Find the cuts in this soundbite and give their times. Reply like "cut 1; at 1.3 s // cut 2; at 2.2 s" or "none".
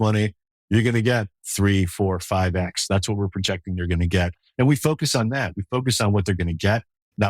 none